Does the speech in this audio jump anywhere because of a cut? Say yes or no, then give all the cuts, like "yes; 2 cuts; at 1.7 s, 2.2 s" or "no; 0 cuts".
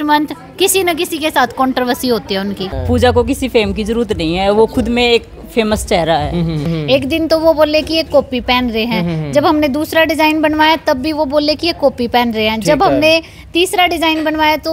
yes; 2 cuts; at 2.7 s, 6.7 s